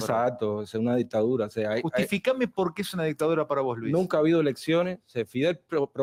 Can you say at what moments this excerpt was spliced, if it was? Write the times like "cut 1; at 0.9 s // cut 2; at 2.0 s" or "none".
none